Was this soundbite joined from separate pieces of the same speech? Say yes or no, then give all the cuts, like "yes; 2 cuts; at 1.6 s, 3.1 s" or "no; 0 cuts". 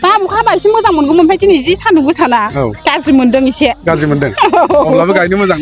no; 0 cuts